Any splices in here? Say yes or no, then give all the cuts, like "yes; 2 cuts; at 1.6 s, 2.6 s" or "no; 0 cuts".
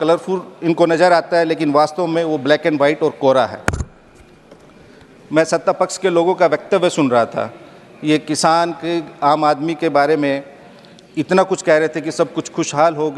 no; 0 cuts